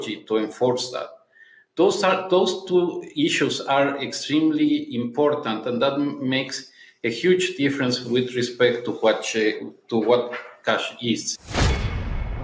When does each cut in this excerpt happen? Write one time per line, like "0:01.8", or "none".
0:11.3